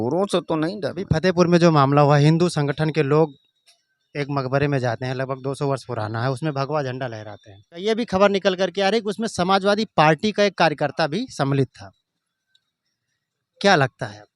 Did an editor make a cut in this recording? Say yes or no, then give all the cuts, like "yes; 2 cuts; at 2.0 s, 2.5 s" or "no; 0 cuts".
yes; 2 cuts; at 1.0 s, 7.8 s